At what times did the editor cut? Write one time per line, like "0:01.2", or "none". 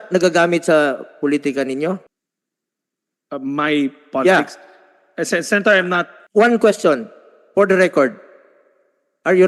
none